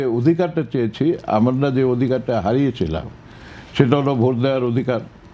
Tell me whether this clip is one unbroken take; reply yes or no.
yes